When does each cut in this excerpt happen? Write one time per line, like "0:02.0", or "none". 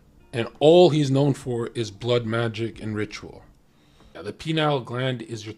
0:04.2